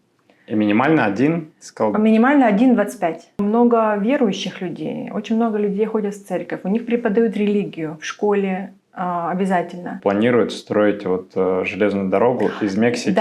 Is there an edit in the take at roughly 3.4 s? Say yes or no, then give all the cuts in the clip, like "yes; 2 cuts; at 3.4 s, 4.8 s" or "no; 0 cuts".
yes; 2 cuts; at 3.4 s, 9.9 s